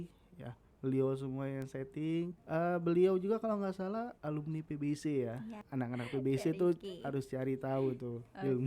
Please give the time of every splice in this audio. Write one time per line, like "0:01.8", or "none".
0:02.4
0:04.2
0:05.6